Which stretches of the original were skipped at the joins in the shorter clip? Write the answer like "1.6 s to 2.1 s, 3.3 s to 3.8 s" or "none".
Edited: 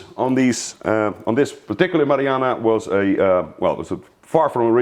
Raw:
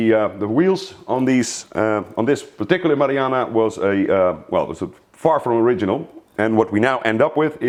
none